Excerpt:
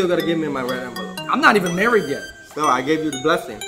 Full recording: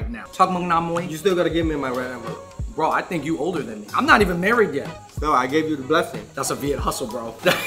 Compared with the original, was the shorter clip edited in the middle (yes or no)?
yes